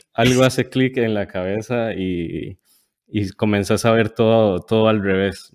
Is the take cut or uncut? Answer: uncut